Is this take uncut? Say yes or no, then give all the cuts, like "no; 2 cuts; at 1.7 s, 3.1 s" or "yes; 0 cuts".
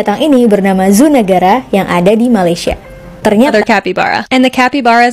no; 1 cut; at 3.5 s